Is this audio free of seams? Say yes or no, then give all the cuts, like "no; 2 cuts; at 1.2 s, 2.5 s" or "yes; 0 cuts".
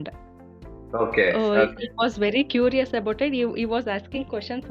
yes; 0 cuts